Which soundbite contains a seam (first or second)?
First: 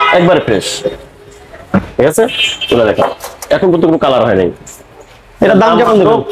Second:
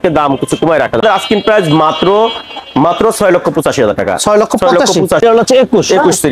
second